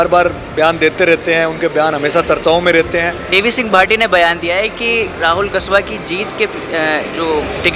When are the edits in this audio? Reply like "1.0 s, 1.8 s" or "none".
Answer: 3.2 s